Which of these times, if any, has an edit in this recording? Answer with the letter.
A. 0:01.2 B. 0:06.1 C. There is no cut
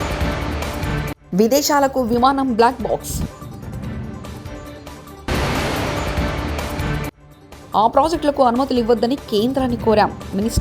A